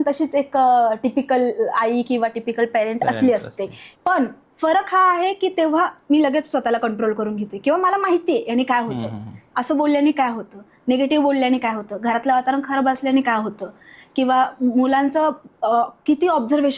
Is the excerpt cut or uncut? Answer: uncut